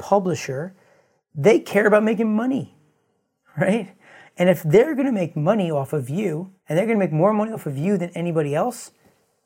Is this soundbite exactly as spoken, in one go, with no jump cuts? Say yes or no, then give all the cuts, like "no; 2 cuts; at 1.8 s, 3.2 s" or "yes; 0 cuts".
no; 1 cut; at 6.5 s